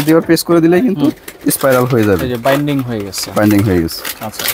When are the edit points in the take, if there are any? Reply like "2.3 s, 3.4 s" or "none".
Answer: none